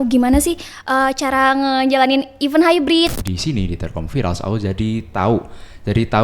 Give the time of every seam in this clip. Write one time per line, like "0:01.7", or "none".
0:03.1